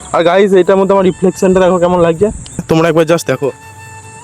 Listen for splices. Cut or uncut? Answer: cut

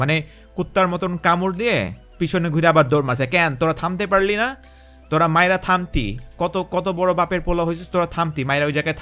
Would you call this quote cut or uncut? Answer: uncut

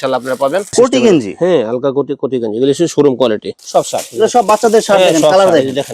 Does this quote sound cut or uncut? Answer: cut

